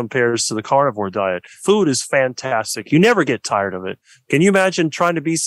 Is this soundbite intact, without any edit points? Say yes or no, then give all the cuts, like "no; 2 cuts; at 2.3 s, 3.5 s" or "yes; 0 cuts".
no; 2 cuts; at 1.5 s, 4.0 s